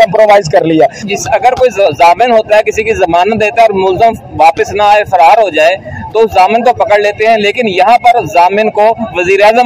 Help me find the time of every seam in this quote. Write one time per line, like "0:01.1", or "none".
0:01.1